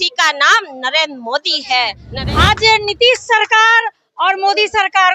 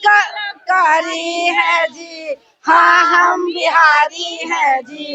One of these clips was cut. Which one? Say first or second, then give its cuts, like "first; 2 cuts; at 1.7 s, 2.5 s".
first; 1 cut; at 2.1 s